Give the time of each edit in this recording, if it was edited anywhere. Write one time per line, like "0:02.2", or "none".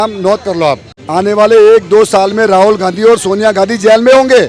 0:00.9